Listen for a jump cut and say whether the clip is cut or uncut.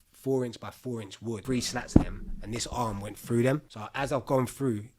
cut